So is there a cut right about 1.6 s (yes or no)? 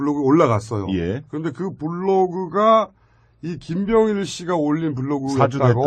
yes